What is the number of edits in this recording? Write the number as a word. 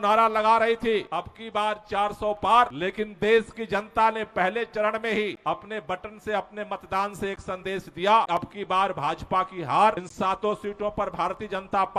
five